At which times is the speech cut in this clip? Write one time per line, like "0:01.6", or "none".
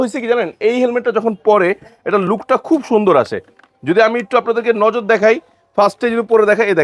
none